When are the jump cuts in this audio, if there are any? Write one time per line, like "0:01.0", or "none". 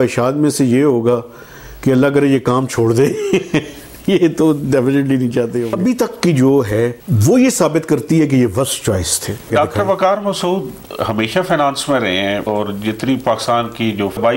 0:05.7
0:09.5
0:12.4